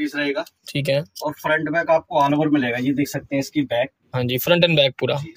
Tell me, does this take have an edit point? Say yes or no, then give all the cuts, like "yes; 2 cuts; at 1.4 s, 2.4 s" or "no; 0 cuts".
no; 0 cuts